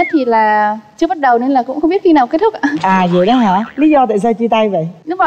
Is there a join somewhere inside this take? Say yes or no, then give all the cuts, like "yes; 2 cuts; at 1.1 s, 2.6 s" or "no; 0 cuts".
no; 0 cuts